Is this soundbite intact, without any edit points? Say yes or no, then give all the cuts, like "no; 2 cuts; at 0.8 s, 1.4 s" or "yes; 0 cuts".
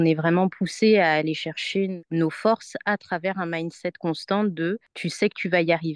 yes; 0 cuts